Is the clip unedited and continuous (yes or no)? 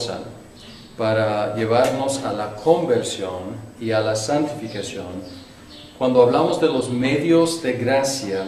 yes